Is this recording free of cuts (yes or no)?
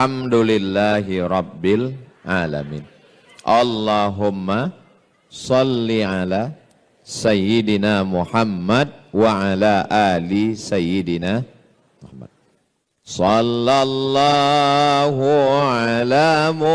yes